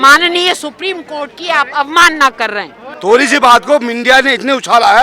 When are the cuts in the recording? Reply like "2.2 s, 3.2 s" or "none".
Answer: 2.9 s